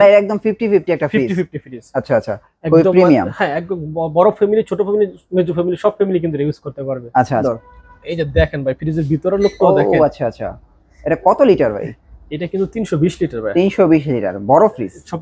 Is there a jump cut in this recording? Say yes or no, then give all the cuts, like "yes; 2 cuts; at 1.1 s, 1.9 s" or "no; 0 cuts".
yes; 1 cut; at 7.4 s